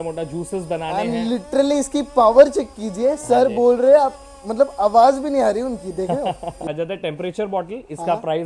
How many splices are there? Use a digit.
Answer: 1